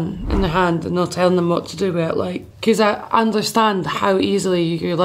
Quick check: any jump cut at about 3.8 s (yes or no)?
no